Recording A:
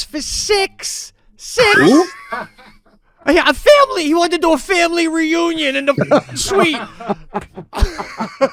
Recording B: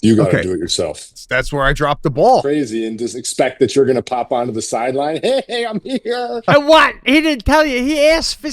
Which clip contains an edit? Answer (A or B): B